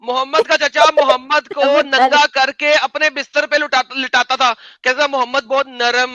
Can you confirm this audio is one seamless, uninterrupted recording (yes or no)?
yes